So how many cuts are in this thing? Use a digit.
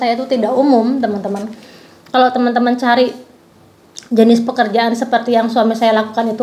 0